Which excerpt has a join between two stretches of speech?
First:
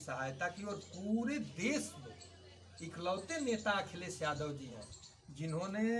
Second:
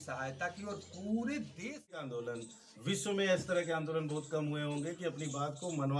second; 1 cut; at 2.1 s

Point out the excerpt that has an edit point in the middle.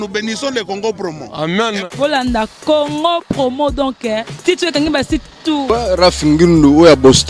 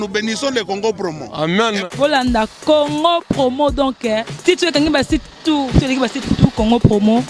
first; 1 cut; at 5.6 s

